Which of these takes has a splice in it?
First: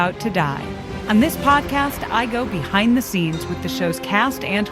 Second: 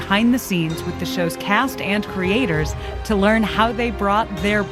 first; 1 cut; at 0.9 s

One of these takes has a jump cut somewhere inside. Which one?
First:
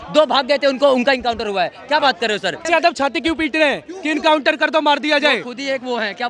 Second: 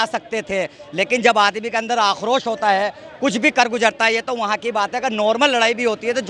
first; 1 cut; at 2.7 s

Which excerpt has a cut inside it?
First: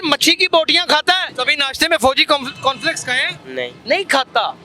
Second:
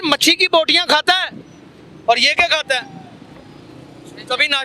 first; 2 cuts; at 1.3 s, 3.6 s

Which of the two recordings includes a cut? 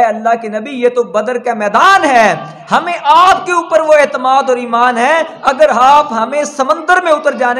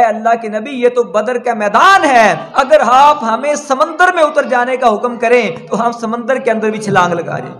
second; 1 cut; at 2.5 s

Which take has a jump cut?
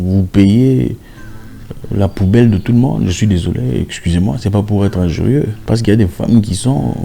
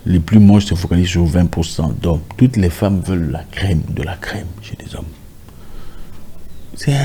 first; 1 cut; at 5.6 s

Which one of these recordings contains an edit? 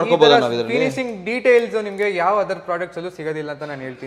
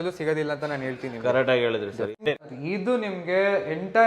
second; 1 cut; at 2.2 s

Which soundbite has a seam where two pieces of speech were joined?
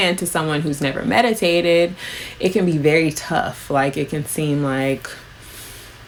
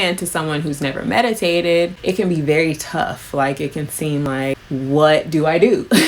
second; 2 cuts; at 2.0 s, 4.3 s

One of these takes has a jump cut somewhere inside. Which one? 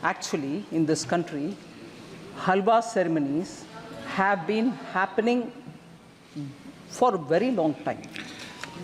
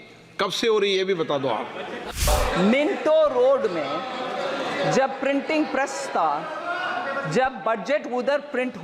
second; 1 cut; at 2.1 s

